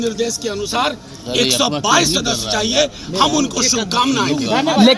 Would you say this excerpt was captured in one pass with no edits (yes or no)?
yes